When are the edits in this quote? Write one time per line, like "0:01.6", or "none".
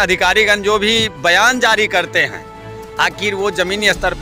none